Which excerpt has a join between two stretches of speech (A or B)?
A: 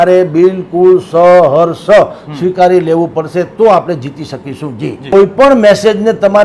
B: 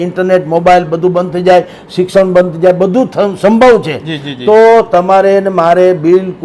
A